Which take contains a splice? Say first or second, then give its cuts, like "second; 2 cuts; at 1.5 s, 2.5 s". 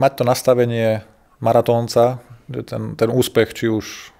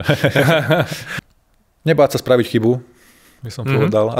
second; 1 cut; at 1.0 s